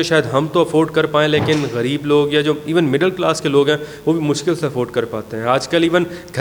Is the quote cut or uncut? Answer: uncut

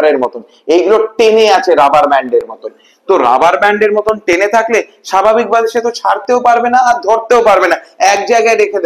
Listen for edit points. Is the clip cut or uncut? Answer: uncut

